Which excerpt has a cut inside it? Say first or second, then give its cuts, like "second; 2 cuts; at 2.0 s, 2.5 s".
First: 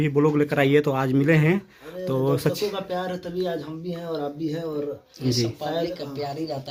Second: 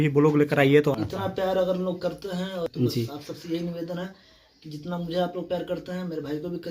second; 2 cuts; at 0.9 s, 2.7 s